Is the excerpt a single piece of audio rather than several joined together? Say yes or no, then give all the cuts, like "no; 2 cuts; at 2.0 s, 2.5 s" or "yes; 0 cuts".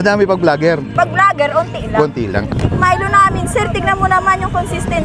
no; 1 cut; at 2.5 s